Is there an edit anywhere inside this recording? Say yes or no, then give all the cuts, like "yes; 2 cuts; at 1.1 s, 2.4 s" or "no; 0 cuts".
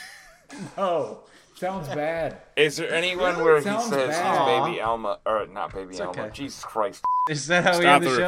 yes; 1 cut; at 7.2 s